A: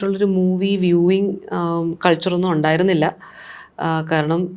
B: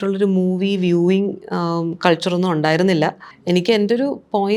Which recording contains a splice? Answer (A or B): B